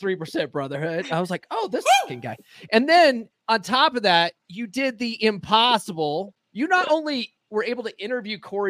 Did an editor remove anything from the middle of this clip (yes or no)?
yes